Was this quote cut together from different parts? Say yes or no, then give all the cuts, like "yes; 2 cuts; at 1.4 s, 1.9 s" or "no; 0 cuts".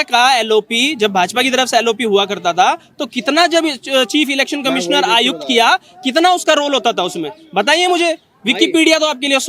no; 0 cuts